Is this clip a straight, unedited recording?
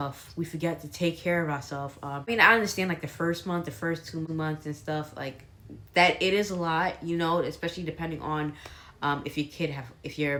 yes; 0 cuts

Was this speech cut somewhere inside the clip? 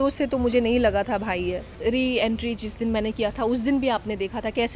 yes; 1 cut; at 1.7 s

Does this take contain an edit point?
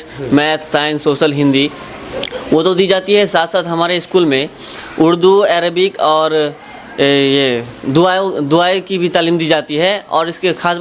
no; 0 cuts

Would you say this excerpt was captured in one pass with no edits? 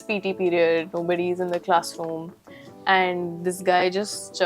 yes; 0 cuts

